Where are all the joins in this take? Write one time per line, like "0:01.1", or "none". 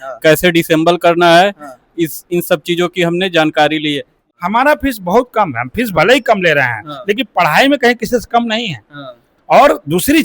0:04.2